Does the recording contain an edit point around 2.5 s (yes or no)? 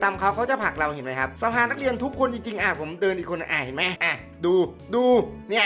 no